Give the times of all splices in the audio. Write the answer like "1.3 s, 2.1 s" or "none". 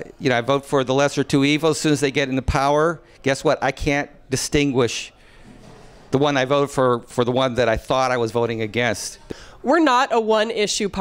9.3 s